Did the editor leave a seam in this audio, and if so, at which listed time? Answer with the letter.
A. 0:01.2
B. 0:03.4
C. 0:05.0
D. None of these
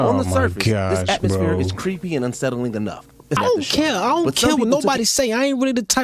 B